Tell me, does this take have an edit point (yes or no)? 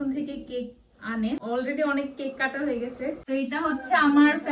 yes